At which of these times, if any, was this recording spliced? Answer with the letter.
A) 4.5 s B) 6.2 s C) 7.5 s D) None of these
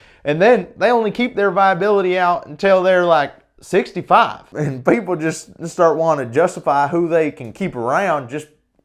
A